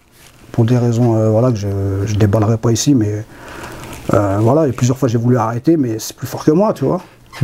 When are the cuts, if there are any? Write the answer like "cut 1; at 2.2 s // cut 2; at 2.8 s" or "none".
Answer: none